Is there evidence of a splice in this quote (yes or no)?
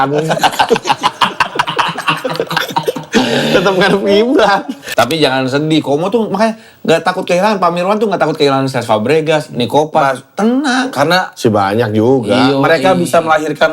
yes